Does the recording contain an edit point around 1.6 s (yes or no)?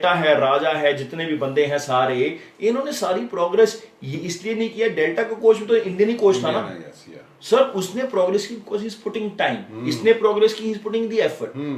no